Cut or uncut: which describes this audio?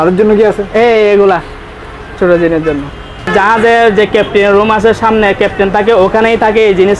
cut